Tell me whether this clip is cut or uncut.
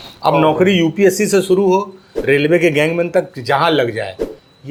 uncut